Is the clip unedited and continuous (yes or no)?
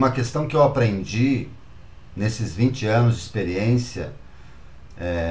yes